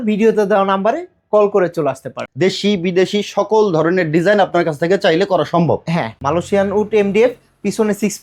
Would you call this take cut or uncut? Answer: cut